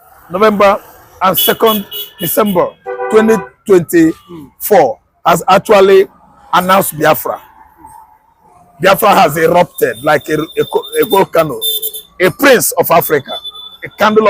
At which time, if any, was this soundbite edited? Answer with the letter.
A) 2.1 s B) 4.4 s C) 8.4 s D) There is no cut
D